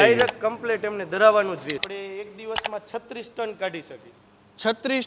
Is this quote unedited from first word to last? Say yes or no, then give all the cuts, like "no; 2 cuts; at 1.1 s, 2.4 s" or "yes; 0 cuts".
no; 1 cut; at 1.8 s